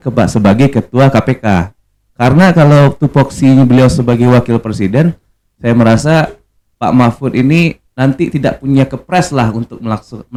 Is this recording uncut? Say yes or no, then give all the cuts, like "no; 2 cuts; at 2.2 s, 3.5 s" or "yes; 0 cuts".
yes; 0 cuts